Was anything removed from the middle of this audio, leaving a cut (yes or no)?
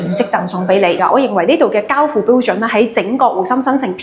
yes